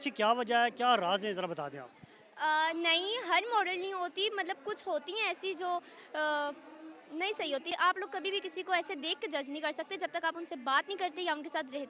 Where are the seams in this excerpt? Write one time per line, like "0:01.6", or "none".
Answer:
0:07.7